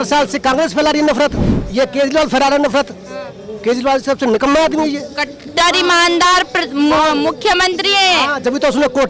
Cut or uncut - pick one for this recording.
uncut